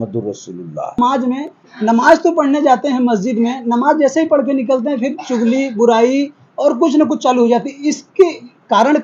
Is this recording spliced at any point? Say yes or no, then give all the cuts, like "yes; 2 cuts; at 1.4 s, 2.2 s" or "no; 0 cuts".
yes; 1 cut; at 1.0 s